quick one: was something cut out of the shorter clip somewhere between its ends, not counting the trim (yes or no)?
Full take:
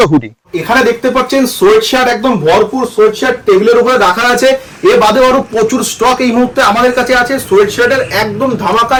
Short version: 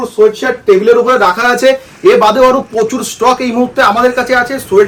no